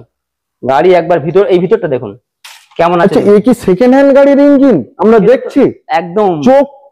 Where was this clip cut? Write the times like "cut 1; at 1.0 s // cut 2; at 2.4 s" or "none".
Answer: none